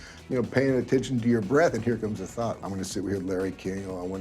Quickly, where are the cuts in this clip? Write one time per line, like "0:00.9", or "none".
0:02.6